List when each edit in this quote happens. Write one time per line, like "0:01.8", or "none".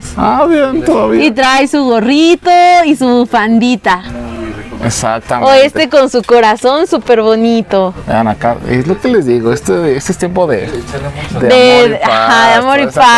none